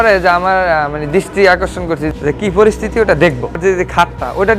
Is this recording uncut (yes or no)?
no